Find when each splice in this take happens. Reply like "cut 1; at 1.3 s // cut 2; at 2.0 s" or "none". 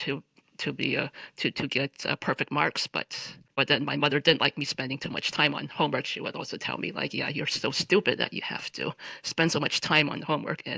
cut 1; at 3.6 s